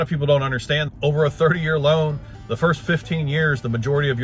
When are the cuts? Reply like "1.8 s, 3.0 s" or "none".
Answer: 0.9 s